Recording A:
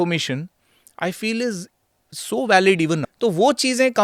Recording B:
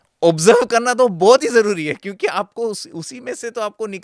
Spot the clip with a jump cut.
A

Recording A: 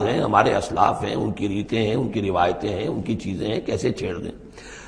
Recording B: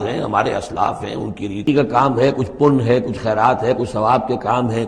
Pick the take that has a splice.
B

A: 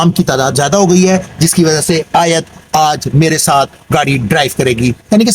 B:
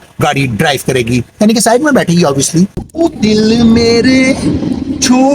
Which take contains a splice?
B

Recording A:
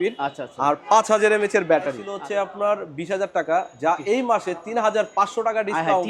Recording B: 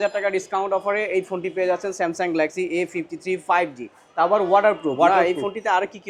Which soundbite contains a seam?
A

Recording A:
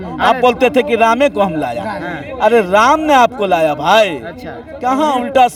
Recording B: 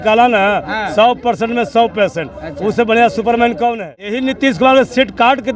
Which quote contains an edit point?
B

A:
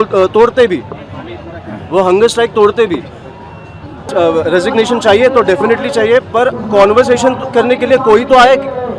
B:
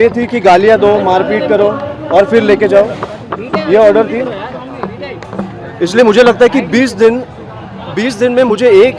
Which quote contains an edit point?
A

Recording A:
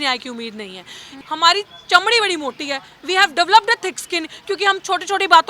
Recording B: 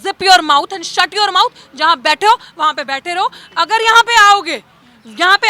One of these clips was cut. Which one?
A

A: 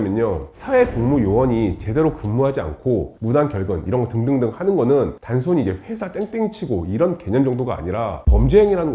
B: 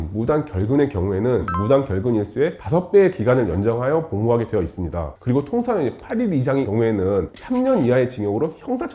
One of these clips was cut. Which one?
B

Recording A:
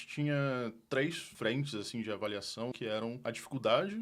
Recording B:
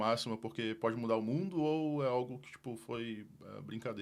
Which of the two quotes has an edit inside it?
A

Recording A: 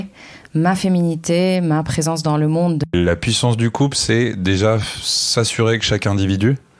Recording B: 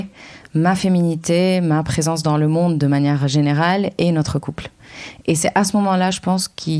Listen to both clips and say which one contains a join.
A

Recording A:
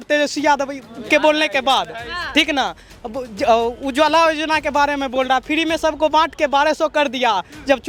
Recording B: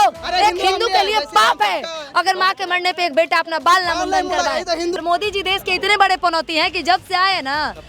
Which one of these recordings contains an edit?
B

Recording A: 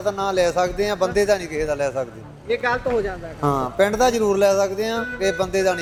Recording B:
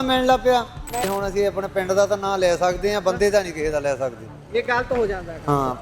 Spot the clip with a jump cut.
B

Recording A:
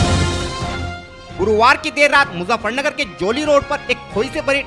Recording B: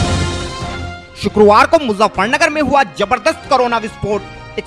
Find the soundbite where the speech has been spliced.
B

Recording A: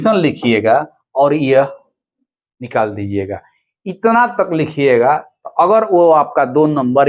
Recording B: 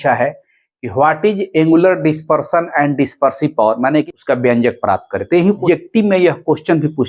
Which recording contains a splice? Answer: B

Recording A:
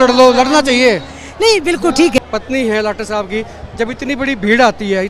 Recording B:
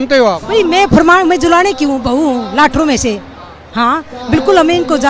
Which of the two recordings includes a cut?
A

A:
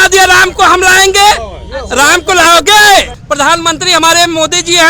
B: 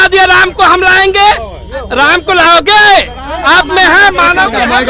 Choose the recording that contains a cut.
A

